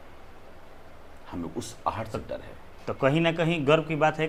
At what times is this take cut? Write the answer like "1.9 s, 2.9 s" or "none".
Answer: none